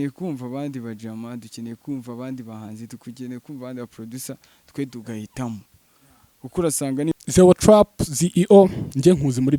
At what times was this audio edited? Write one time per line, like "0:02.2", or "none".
0:07.1